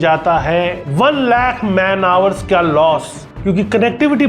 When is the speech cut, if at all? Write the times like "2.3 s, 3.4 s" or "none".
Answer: 3.3 s